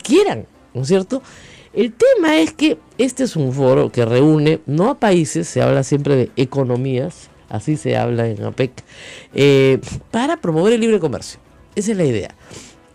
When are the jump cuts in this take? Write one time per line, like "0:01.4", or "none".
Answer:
none